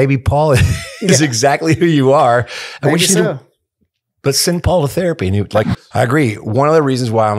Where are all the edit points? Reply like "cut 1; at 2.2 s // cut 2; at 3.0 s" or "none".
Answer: cut 1; at 5.7 s